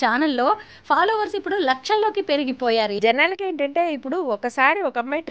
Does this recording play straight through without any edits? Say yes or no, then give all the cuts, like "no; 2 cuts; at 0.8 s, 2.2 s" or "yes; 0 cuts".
no; 1 cut; at 3.0 s